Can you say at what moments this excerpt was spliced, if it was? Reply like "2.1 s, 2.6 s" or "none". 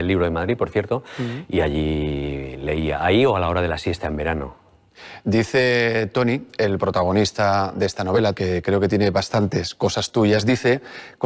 9.2 s